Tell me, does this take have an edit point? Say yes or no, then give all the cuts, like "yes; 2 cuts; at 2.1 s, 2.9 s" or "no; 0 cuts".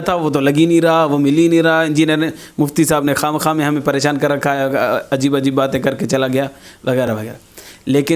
no; 0 cuts